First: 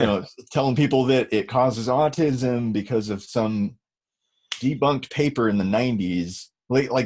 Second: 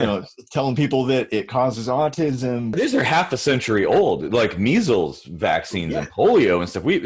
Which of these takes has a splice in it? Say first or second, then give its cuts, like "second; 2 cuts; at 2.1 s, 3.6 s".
second; 1 cut; at 2.7 s